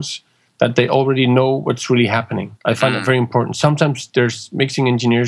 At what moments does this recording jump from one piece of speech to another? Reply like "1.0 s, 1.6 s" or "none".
2.6 s